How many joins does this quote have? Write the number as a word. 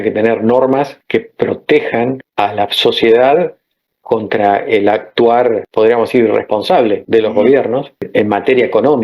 five